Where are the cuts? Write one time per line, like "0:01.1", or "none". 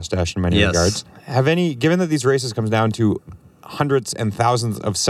0:01.1

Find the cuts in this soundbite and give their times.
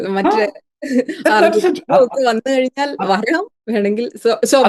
none

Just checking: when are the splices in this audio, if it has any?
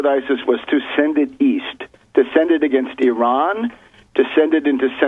0:03.2

